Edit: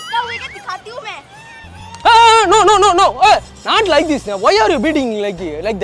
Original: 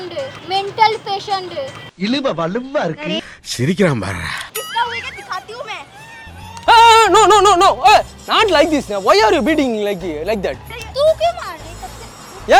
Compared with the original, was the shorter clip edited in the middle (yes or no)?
no